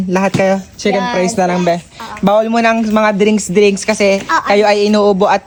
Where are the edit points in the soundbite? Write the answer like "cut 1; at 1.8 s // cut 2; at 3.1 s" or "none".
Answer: none

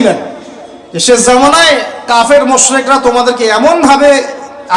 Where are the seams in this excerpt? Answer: none

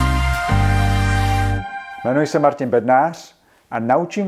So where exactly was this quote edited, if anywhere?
cut 1; at 1.8 s

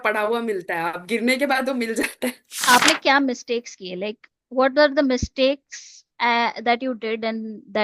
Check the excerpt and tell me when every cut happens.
cut 1; at 2.6 s

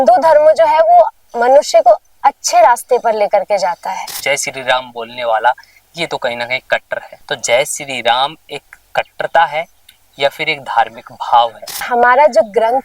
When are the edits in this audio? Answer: cut 1; at 4.1 s // cut 2; at 7.1 s // cut 3; at 11.8 s

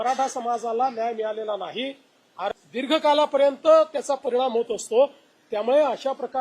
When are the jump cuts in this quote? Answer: cut 1; at 2.5 s

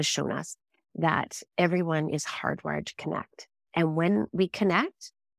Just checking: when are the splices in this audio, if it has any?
none

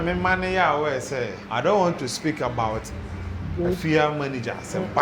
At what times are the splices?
cut 1; at 1.4 s

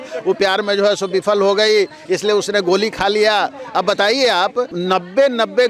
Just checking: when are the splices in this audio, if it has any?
none

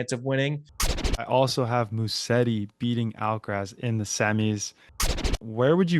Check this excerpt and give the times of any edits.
cut 1; at 1.1 s // cut 2; at 5.2 s

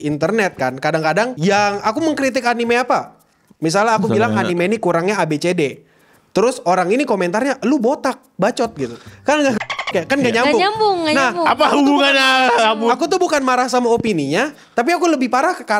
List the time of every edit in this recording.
cut 1; at 1.3 s

